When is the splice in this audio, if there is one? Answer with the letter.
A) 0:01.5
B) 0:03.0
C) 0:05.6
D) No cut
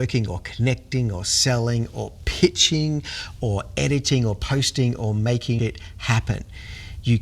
C